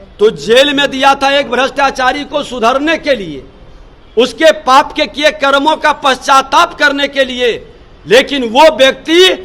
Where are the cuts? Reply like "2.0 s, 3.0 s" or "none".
none